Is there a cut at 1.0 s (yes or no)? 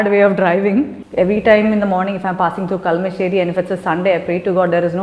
yes